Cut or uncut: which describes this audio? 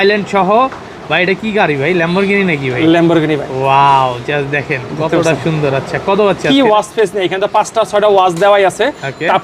uncut